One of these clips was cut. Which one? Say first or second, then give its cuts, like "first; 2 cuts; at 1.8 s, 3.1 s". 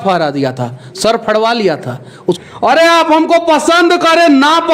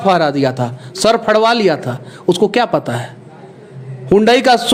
first; 1 cut; at 2.4 s